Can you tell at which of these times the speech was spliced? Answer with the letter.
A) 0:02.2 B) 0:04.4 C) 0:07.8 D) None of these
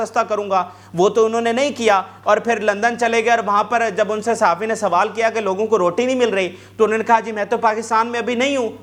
D